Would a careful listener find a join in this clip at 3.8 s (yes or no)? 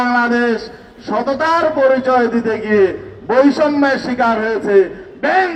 no